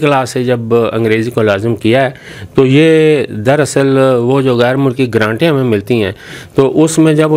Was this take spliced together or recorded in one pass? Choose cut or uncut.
uncut